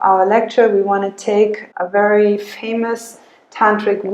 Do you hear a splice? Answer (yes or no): yes